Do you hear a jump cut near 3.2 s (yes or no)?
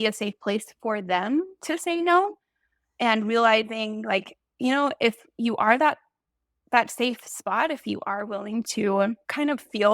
no